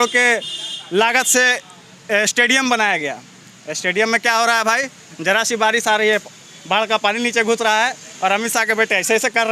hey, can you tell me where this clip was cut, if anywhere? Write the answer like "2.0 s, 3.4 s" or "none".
none